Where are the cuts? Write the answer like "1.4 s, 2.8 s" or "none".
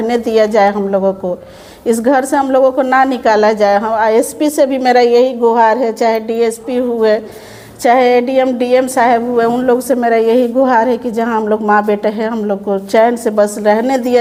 none